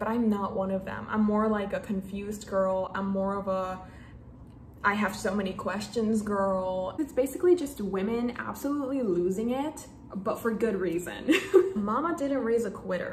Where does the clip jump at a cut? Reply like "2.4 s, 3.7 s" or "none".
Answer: 7.0 s, 11.7 s